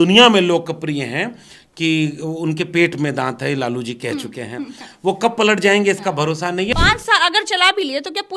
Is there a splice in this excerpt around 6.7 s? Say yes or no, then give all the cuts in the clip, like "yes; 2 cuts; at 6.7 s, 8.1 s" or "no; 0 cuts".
yes; 1 cut; at 6.7 s